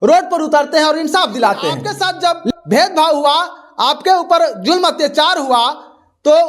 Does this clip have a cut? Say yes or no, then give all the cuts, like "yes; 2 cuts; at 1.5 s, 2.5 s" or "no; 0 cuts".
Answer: yes; 1 cut; at 1.9 s